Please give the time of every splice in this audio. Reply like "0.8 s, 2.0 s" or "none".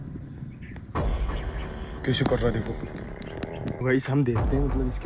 3.7 s